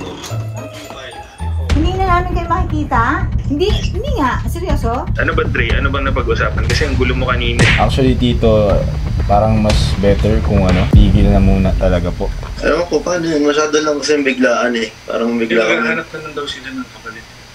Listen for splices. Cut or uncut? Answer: cut